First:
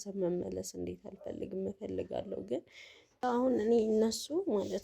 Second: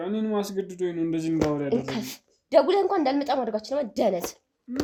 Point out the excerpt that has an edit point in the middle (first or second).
first